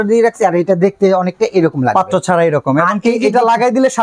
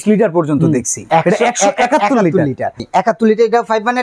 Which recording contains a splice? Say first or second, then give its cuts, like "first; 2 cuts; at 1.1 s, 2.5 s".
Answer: second; 2 cuts; at 0.9 s, 2.8 s